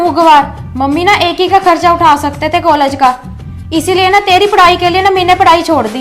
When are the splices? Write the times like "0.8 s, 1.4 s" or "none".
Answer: none